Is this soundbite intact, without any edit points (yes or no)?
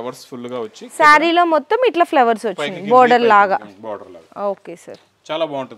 yes